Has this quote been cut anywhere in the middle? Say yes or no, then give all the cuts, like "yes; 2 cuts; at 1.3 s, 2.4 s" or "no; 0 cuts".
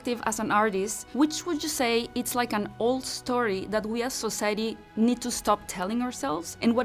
no; 0 cuts